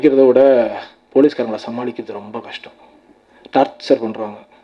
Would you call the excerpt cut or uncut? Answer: uncut